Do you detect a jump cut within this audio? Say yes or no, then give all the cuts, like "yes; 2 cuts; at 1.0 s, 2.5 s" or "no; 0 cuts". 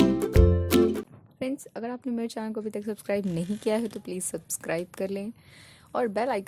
yes; 1 cut; at 1.1 s